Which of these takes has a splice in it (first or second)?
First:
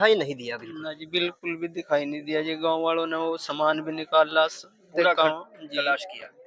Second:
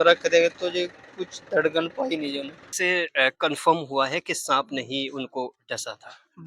second